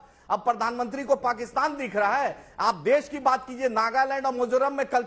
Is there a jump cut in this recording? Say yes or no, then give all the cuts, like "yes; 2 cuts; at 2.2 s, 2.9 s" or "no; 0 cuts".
no; 0 cuts